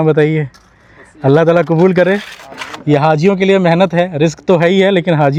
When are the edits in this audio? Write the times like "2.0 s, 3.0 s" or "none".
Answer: none